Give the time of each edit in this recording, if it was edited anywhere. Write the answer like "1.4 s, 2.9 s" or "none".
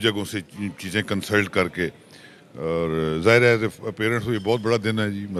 none

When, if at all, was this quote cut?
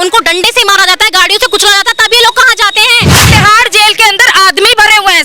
3.3 s

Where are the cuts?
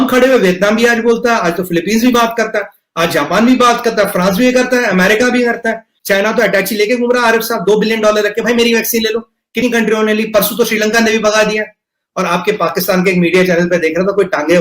5.9 s

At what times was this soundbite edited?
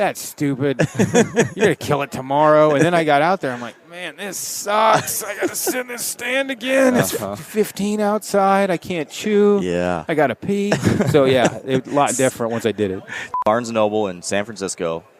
13.3 s

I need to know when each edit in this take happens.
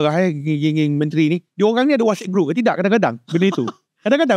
none

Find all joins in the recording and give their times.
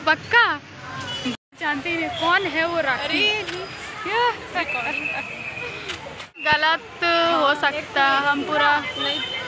none

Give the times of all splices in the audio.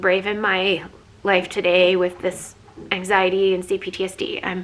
none

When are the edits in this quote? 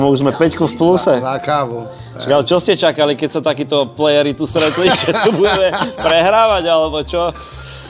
none

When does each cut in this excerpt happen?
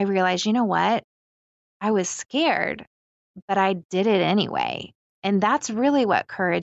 none

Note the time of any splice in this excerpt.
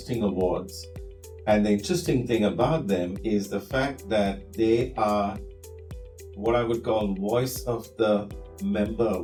none

